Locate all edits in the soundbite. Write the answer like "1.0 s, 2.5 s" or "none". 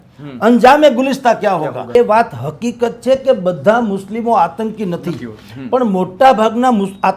1.9 s